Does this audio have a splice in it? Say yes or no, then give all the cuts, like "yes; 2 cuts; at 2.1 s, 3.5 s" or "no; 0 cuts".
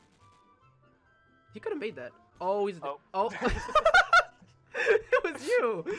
no; 0 cuts